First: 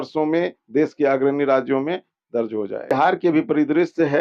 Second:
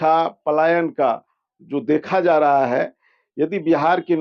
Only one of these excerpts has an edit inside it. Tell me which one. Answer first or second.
first